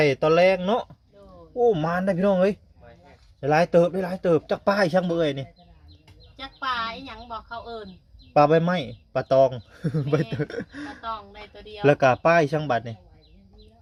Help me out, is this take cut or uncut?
uncut